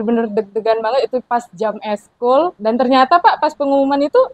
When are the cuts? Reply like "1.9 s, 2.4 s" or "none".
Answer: 2.6 s